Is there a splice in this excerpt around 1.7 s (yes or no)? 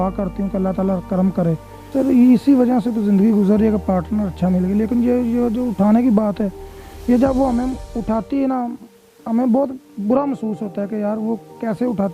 yes